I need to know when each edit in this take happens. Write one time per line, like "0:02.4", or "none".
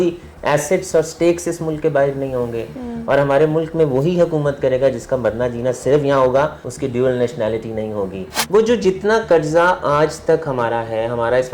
0:06.7
0:08.3